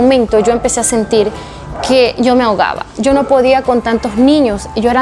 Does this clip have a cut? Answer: no; 0 cuts

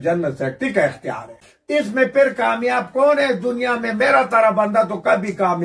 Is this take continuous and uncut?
no; 1 cut; at 1.5 s

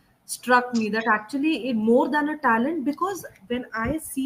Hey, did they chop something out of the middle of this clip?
no; 0 cuts

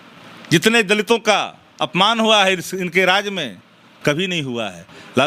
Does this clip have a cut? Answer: no; 0 cuts

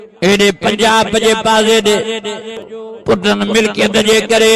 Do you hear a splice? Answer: yes; 1 cut; at 2.7 s

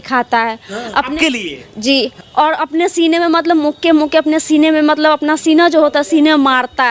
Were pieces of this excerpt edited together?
yes; 1 cut; at 2.2 s

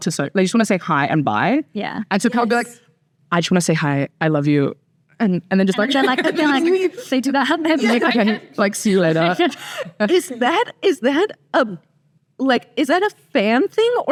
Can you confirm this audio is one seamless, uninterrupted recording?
yes; 0 cuts

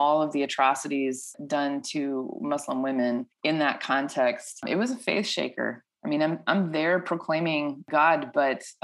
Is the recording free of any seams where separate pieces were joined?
no; 4 cuts; at 1.3 s, 3.3 s, 4.6 s, 7.8 s

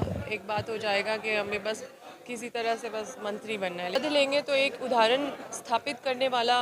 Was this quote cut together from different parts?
yes; 1 cut; at 3.9 s

